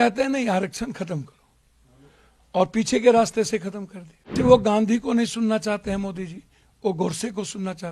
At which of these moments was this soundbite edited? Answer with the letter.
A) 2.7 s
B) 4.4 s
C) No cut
B